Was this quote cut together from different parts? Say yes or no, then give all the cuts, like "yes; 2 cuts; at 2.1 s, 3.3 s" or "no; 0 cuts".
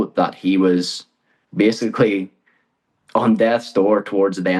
no; 0 cuts